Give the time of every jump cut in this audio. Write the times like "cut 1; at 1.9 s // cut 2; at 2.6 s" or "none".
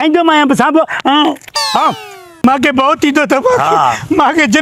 cut 1; at 2.4 s